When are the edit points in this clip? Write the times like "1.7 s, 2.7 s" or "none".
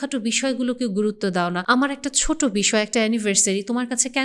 1.6 s